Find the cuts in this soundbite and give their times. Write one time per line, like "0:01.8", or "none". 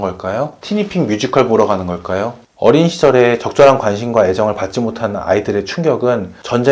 0:02.4